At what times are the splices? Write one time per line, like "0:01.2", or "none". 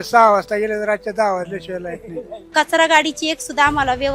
0:02.4